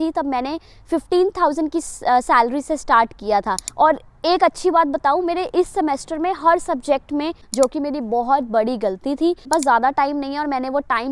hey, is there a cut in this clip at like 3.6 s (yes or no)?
yes